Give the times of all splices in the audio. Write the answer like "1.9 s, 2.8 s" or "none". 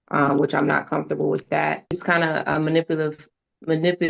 2.0 s